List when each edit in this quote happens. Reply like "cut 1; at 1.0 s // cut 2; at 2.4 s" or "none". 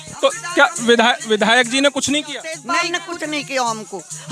cut 1; at 2.6 s